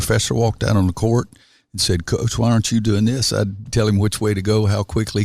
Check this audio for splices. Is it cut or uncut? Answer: cut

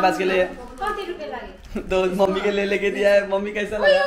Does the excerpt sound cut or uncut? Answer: cut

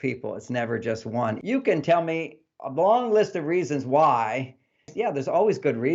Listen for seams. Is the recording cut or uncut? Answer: cut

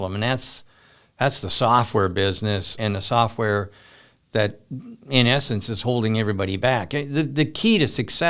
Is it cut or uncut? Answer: cut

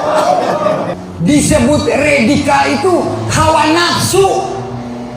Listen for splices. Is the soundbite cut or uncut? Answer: cut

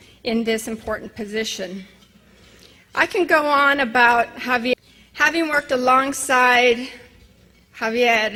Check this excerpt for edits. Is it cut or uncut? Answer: uncut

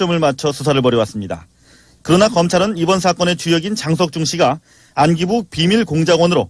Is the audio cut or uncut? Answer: uncut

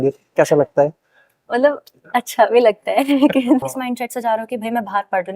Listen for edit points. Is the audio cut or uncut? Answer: cut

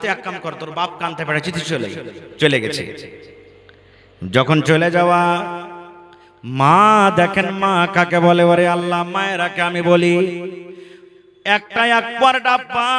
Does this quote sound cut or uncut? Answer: uncut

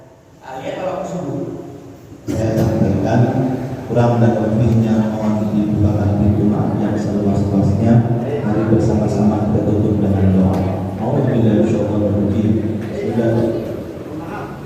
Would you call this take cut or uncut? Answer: cut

